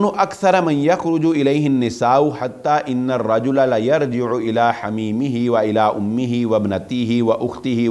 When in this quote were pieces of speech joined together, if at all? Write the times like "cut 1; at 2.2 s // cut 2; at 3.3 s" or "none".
none